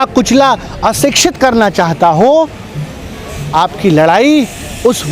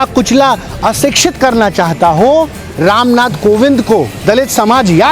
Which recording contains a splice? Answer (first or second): second